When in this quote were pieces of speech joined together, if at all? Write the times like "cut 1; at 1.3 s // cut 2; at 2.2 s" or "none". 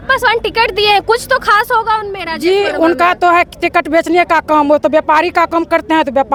none